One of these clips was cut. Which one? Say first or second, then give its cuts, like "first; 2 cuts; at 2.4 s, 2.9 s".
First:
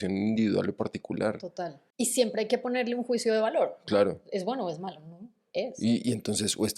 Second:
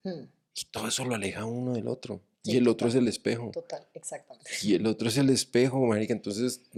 first; 1 cut; at 1.8 s